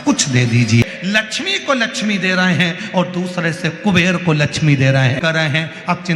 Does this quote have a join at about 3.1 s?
no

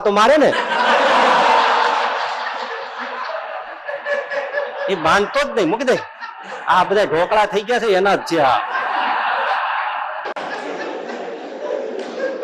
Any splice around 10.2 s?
no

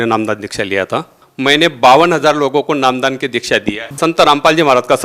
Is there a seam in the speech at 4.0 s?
yes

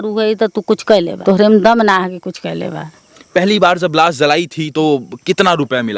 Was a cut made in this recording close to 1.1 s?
yes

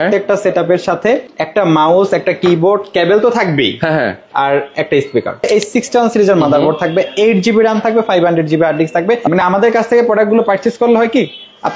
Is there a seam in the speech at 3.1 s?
no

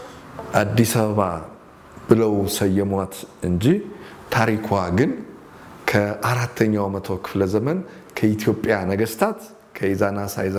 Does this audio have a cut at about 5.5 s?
no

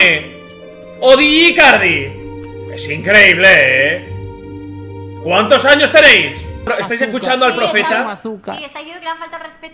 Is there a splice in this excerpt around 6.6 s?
yes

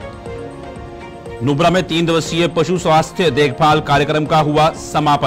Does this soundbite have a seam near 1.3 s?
yes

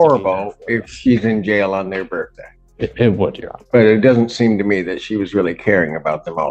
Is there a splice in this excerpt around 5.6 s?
no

